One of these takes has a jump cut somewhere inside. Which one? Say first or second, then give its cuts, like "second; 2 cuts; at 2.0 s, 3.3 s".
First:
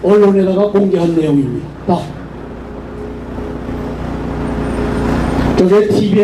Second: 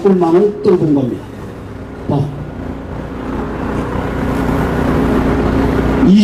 first; 1 cut; at 3.2 s